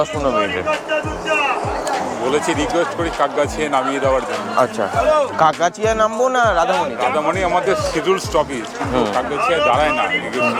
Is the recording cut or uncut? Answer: uncut